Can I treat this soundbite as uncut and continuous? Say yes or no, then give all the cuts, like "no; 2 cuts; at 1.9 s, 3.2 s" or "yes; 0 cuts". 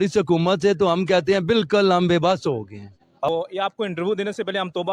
no; 1 cut; at 3.3 s